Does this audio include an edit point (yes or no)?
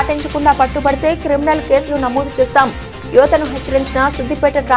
no